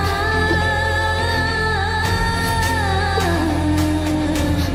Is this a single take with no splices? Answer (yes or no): yes